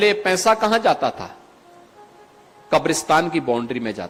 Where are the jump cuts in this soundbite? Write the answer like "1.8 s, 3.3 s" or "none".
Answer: none